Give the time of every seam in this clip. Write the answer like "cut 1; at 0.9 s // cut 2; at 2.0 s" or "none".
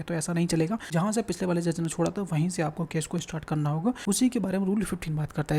cut 1; at 0.9 s // cut 2; at 4.0 s